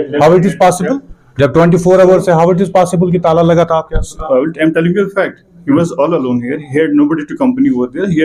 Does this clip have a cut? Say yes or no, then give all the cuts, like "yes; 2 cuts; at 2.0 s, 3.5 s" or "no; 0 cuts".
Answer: no; 0 cuts